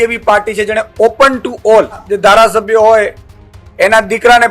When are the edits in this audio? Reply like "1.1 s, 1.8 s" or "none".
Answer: 2.1 s